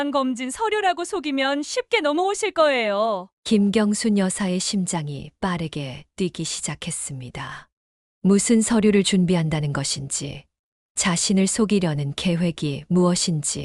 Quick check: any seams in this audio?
no; 0 cuts

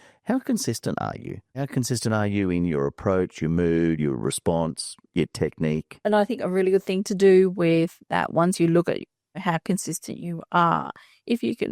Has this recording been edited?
yes; 3 cuts; at 1.6 s, 5.9 s, 9.4 s

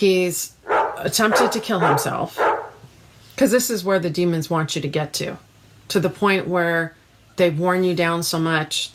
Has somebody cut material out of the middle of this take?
no; 0 cuts

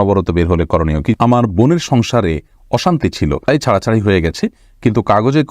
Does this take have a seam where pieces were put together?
yes; 2 cuts; at 1.2 s, 3.5 s

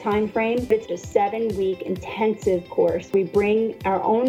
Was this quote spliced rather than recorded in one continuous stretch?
yes; 2 cuts; at 0.9 s, 3.1 s

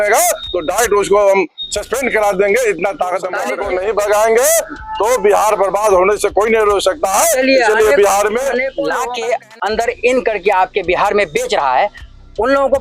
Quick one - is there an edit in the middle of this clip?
yes; 2 cuts; at 3.5 s, 8.8 s

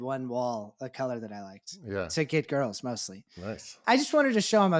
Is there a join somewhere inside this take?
yes; 1 cut; at 3.7 s

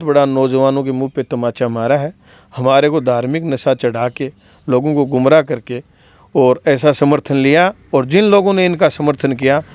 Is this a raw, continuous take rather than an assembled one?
yes; 0 cuts

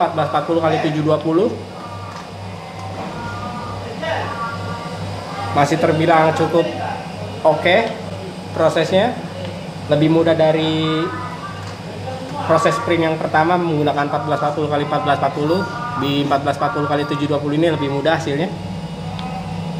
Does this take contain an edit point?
no; 0 cuts

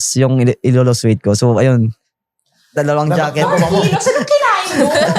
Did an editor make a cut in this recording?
no; 0 cuts

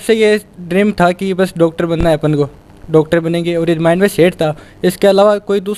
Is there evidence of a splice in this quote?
no; 0 cuts

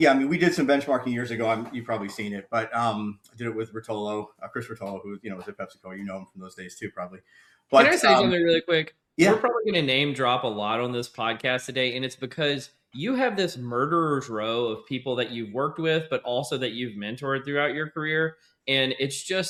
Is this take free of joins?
yes; 0 cuts

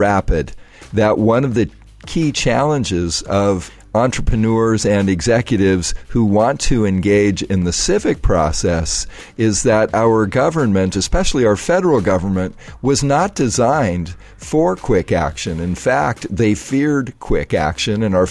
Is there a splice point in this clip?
yes; 2 cuts; at 3.7 s, 10.9 s

